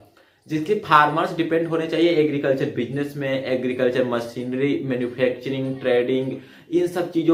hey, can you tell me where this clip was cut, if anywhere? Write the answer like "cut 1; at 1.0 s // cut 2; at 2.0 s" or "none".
none